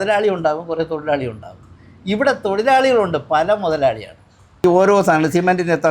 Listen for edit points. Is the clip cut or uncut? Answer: cut